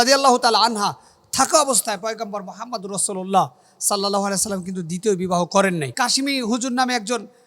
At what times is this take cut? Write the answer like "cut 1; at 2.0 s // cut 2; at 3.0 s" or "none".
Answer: cut 1; at 5.9 s

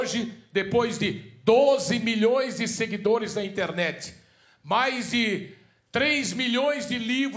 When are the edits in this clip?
none

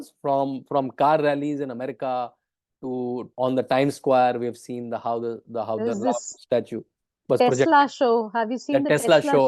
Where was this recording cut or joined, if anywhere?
cut 1; at 3.3 s

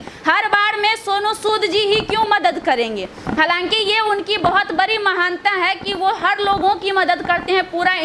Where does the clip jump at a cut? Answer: none

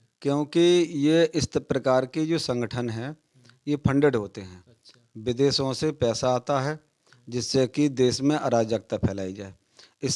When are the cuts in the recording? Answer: none

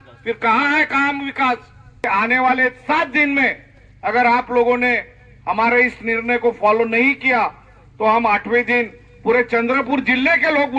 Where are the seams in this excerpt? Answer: cut 1; at 2.1 s

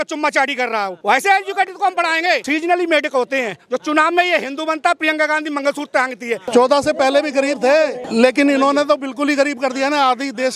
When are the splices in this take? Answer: cut 1; at 0.9 s // cut 2; at 2.4 s // cut 3; at 6.5 s // cut 4; at 8.0 s

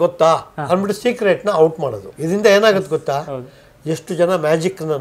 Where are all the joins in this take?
cut 1; at 2.1 s

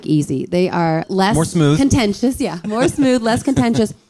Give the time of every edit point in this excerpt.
cut 1; at 1.1 s

